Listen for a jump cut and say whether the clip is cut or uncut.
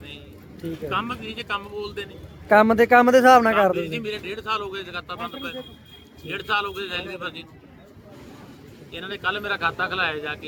uncut